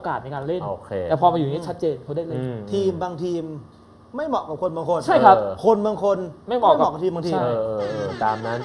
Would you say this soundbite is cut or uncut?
uncut